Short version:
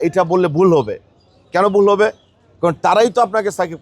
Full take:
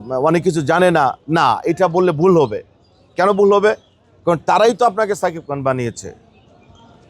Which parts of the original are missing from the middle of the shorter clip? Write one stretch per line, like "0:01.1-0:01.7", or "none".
none